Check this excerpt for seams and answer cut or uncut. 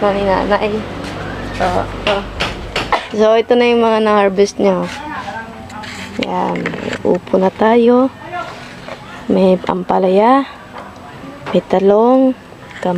cut